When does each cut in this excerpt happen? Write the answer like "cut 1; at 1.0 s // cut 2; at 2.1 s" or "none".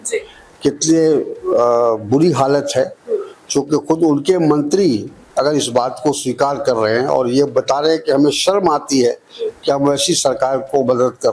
none